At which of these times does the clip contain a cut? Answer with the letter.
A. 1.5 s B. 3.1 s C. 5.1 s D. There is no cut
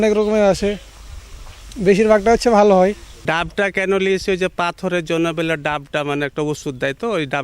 B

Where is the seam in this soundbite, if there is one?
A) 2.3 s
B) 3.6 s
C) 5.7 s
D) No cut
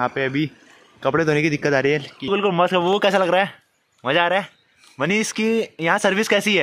A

